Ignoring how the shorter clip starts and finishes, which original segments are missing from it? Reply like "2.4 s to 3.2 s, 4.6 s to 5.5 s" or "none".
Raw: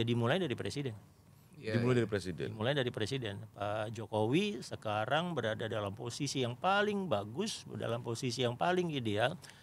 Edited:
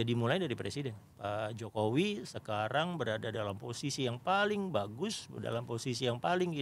1.1 s to 3.5 s